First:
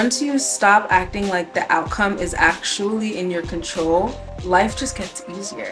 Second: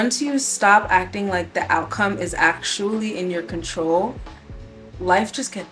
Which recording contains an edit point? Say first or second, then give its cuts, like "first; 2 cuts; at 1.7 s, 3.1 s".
first; 1 cut; at 4.3 s